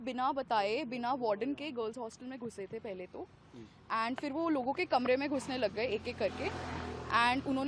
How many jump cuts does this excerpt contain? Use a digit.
0